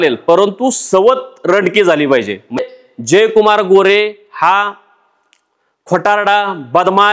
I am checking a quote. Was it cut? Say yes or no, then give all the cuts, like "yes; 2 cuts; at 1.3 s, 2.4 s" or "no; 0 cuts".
yes; 1 cut; at 2.6 s